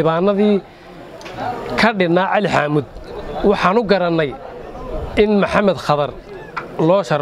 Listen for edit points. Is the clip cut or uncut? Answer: uncut